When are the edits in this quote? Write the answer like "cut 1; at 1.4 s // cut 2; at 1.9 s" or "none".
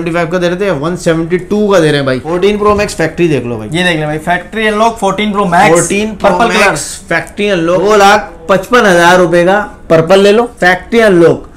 cut 1; at 2.3 s // cut 2; at 7.8 s // cut 3; at 10.5 s